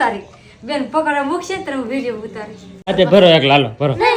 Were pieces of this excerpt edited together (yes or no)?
yes